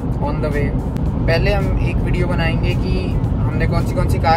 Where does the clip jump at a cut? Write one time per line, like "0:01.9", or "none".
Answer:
none